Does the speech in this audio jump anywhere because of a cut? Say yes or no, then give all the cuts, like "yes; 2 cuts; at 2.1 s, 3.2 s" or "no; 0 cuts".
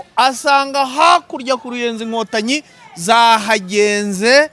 no; 0 cuts